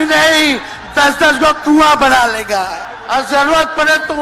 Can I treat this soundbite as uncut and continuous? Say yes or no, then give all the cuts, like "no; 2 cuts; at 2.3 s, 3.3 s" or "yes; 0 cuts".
no; 1 cut; at 2.9 s